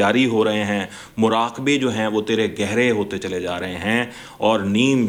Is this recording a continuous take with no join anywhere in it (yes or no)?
yes